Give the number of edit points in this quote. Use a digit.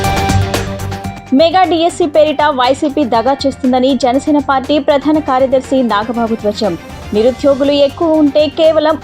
1